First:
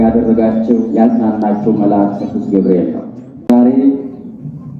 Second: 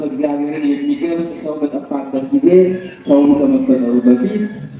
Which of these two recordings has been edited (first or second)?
first